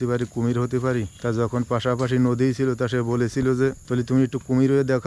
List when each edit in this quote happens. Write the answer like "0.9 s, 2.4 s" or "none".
1.1 s, 3.8 s